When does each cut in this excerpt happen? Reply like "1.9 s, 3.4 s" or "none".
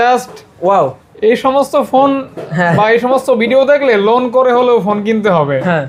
none